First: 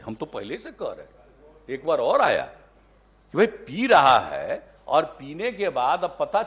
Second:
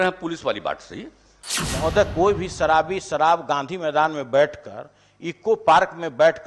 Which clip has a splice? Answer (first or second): second